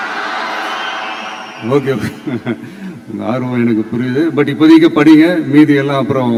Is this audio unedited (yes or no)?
yes